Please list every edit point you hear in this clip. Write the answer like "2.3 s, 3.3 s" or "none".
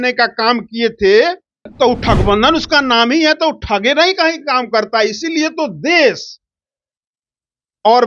1.6 s